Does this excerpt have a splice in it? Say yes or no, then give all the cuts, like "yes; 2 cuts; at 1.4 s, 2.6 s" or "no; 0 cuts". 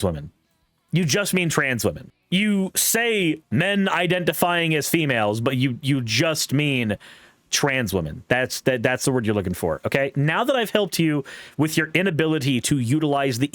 yes; 1 cut; at 2.1 s